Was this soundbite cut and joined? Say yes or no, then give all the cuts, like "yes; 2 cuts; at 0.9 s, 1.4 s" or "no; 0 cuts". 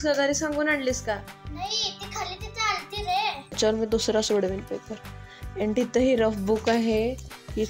yes; 1 cut; at 3.6 s